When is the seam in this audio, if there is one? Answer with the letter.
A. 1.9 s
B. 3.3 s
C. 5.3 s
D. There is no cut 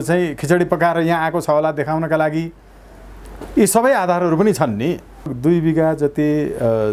C